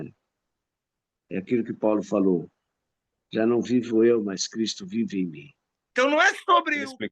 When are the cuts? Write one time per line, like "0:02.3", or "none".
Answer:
0:05.7